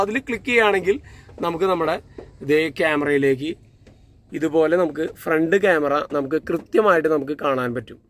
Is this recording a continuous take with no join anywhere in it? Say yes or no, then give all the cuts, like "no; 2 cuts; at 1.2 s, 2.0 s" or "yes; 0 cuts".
yes; 0 cuts